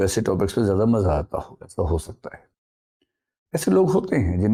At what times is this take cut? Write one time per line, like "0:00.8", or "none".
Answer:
none